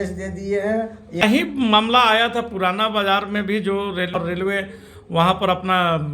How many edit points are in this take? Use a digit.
2